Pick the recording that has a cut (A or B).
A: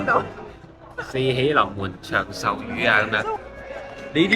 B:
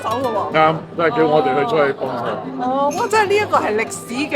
A